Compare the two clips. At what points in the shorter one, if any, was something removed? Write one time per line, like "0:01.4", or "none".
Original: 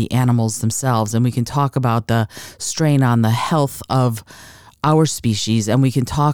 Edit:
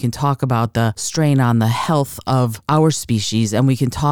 0:01.0
0:02.6